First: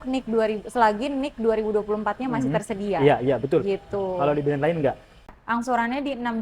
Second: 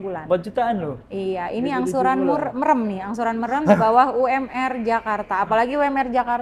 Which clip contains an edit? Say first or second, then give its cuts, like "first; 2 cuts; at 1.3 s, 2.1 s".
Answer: first; 1 cut; at 5.3 s